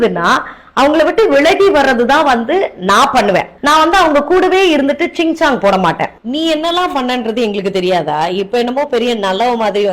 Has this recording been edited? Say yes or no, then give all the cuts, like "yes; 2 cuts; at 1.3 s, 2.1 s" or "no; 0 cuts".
yes; 2 cuts; at 3.5 s, 6.1 s